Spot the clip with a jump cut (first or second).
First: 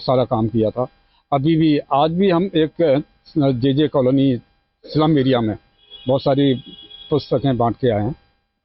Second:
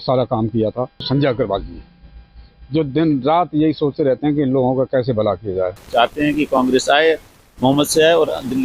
second